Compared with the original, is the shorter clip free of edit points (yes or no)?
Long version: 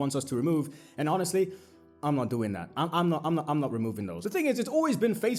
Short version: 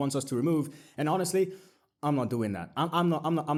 yes